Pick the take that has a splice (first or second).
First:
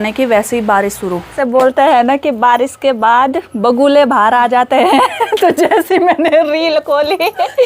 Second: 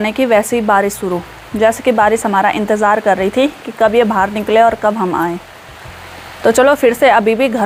first